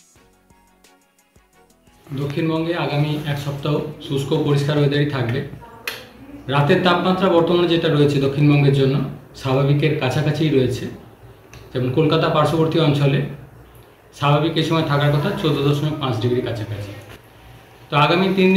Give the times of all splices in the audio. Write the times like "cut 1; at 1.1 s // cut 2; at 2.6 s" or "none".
cut 1; at 2.0 s